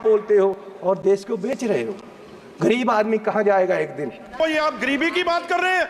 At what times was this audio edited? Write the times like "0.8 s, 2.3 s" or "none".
4.4 s